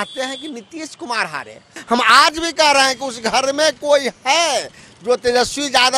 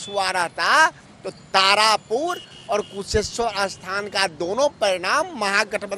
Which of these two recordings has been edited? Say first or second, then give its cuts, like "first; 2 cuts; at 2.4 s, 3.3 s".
first; 1 cut; at 1.8 s